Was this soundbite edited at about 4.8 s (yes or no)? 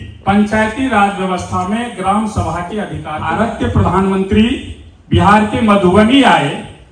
no